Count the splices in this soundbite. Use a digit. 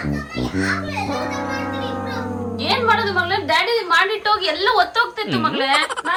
0